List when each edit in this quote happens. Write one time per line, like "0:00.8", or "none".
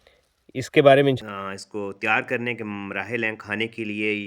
0:01.2